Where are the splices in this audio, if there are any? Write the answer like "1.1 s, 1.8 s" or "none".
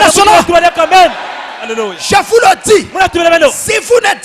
none